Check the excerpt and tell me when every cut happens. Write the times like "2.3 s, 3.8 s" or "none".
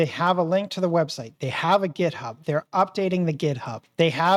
none